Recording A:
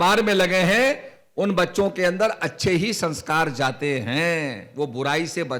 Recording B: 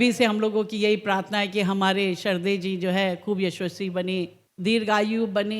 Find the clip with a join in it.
B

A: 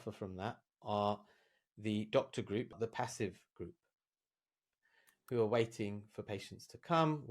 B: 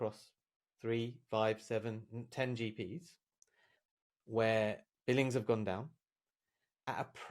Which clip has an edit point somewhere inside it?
A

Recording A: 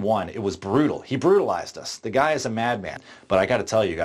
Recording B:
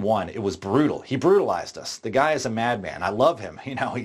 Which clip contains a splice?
A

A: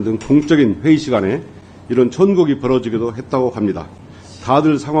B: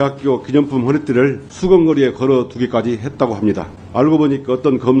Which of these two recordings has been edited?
B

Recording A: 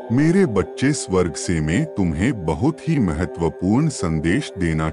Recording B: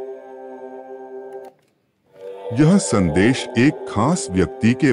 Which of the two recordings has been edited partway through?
B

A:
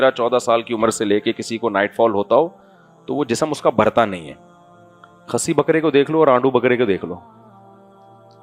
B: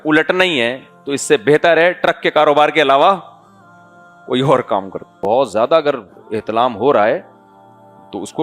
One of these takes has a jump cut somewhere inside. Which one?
B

